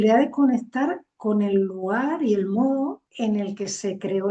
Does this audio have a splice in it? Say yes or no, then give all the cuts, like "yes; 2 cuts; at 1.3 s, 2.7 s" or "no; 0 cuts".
no; 0 cuts